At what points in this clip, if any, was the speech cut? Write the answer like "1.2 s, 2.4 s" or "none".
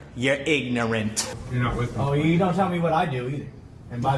1.3 s